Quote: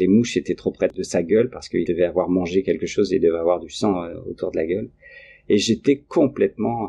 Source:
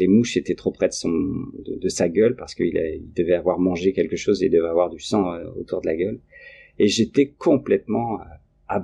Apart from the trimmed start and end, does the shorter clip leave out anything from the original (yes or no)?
yes